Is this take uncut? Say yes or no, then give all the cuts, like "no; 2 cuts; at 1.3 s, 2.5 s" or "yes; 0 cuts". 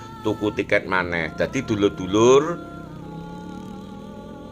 yes; 0 cuts